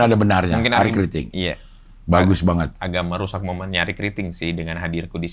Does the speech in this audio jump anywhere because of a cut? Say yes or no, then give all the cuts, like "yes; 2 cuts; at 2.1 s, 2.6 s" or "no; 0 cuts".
yes; 1 cut; at 2.8 s